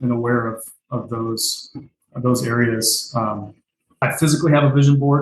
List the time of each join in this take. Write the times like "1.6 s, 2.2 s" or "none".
4.0 s